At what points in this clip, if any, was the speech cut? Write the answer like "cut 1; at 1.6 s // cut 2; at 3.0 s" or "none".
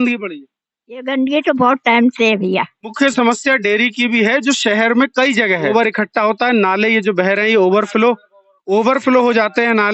cut 1; at 2.9 s // cut 2; at 5.7 s